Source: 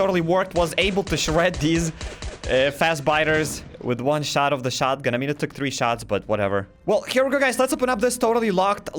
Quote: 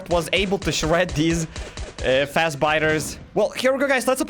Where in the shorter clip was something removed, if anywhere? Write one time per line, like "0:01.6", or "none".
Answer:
0:03.2